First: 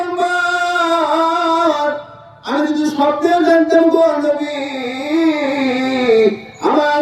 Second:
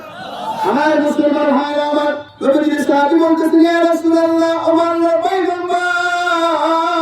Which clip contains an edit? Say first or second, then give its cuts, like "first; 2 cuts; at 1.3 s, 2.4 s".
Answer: second; 1 cut; at 2.3 s